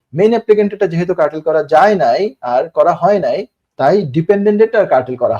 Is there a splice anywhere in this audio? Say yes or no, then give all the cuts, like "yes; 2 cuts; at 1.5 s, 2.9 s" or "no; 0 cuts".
no; 0 cuts